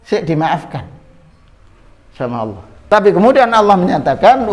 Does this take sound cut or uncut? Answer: cut